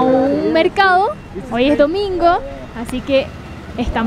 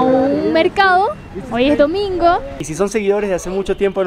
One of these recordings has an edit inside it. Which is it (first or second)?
second